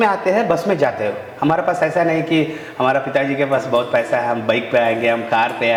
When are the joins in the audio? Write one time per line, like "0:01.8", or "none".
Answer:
none

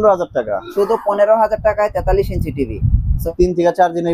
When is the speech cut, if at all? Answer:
0:03.1

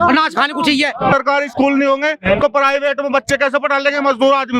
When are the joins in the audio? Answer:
0:01.1

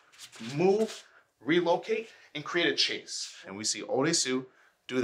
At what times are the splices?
0:03.5

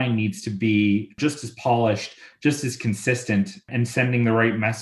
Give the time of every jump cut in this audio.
0:01.1
0:03.7

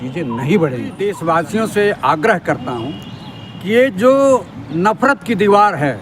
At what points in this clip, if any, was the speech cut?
0:01.2

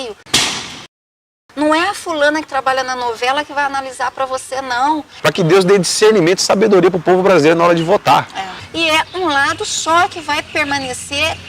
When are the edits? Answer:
0:05.1
0:08.6

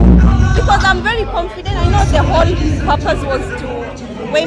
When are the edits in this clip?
none

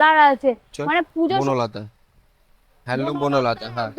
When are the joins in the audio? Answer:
0:01.4

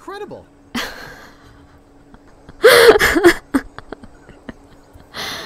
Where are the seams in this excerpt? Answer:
0:02.2

